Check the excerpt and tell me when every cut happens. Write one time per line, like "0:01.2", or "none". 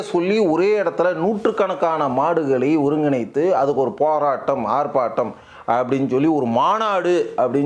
none